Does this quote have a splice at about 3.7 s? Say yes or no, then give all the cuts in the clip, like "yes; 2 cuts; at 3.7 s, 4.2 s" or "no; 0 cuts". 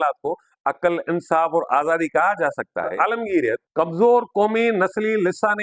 yes; 2 cuts; at 2.9 s, 3.7 s